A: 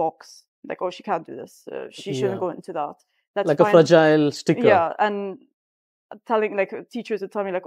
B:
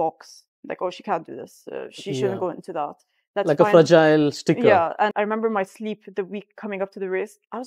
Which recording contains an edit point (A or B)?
B